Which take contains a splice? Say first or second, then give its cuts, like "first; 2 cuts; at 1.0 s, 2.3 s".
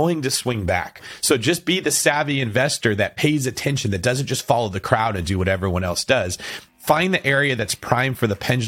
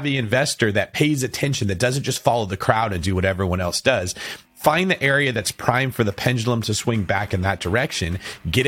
first; 1 cut; at 1.0 s